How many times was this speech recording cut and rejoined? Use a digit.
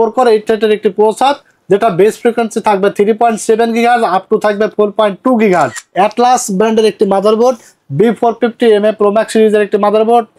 1